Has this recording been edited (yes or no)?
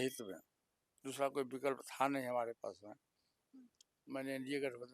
no